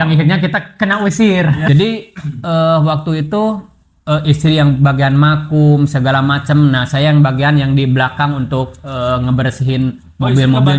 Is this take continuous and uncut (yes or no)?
no